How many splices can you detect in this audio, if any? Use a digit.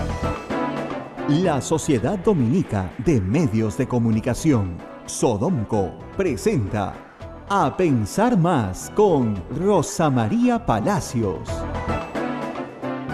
1